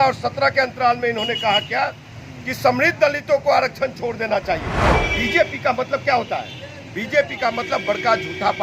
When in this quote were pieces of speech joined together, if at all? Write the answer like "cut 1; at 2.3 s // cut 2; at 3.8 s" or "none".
cut 1; at 5.0 s